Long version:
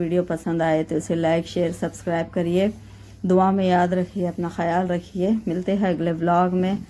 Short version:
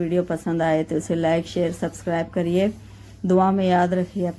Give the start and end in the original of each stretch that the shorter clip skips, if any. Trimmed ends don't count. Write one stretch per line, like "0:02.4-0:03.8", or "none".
none